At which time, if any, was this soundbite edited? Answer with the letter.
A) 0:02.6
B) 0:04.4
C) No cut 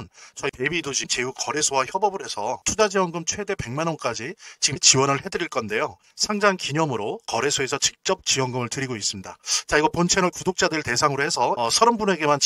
A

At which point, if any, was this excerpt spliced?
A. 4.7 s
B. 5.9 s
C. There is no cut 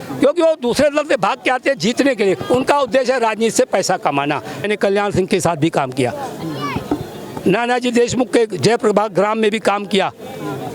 A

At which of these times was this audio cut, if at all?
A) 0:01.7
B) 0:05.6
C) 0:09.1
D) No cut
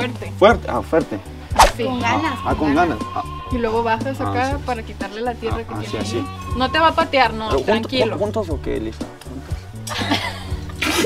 D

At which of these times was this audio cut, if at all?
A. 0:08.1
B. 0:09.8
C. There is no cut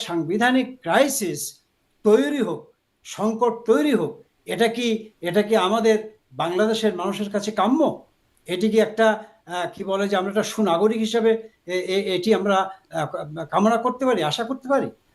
C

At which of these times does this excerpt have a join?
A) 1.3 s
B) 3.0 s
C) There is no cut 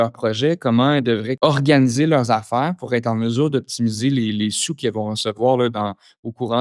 A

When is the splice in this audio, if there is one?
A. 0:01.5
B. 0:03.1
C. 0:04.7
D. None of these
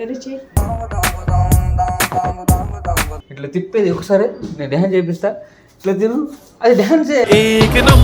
B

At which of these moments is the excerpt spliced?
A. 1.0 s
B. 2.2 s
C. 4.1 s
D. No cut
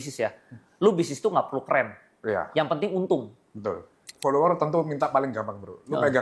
C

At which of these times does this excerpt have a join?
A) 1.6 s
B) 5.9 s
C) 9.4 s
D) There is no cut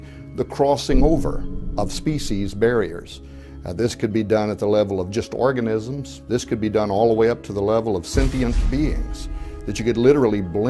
A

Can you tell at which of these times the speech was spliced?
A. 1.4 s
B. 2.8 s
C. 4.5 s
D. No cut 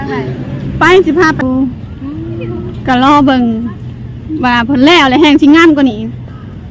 A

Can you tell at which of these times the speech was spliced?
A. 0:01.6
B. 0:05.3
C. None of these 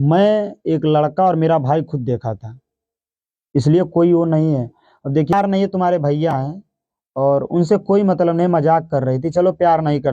B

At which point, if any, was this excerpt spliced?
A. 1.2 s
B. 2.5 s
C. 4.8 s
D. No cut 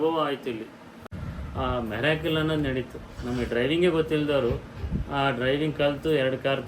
A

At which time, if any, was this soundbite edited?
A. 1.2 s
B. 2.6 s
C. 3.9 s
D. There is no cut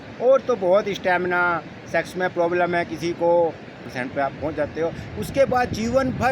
C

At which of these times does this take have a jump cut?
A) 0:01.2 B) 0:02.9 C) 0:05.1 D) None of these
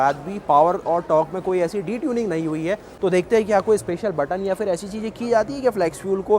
B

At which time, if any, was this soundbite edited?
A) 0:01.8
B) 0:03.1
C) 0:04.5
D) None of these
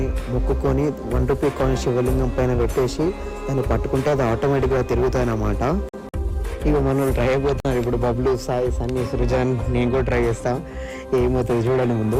D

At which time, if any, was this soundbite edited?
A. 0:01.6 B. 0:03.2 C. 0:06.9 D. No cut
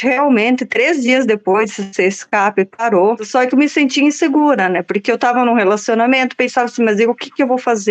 B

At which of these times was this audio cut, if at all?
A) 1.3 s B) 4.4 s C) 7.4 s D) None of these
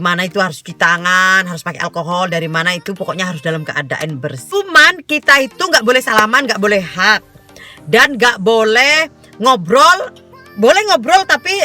B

